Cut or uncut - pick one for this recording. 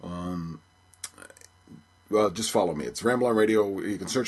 uncut